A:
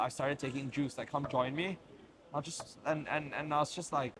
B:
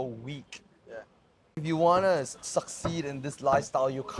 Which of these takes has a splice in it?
B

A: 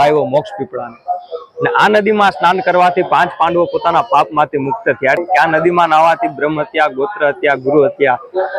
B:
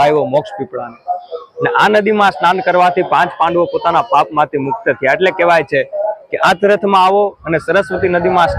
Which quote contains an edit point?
A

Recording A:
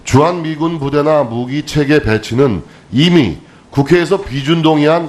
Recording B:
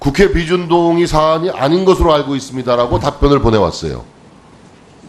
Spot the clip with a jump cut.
B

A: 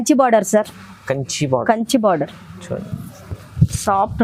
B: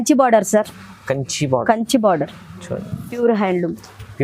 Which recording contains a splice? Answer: B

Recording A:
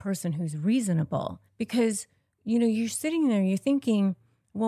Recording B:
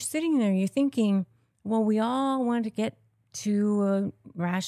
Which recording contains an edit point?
A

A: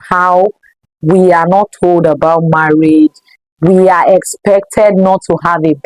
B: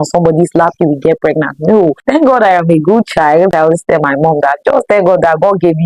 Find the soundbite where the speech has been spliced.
B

